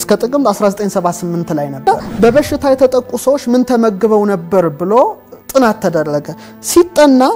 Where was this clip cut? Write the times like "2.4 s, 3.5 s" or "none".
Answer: 1.8 s